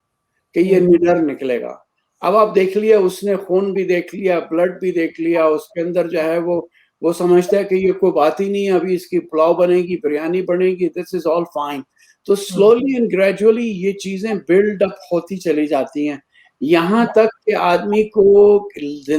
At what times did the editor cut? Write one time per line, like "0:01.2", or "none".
none